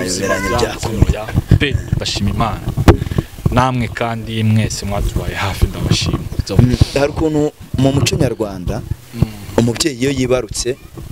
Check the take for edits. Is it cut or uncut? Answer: uncut